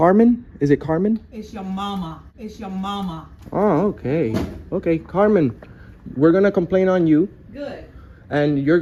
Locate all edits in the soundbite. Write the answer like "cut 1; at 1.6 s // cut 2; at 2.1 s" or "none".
none